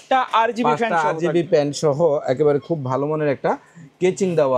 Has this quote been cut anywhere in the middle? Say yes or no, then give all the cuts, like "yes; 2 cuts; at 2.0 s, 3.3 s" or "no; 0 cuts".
no; 0 cuts